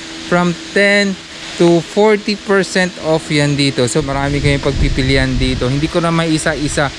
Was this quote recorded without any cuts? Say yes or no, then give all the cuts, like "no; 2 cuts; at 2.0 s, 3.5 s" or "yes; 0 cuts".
yes; 0 cuts